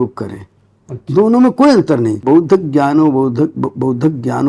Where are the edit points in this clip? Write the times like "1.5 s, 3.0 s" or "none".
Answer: 2.2 s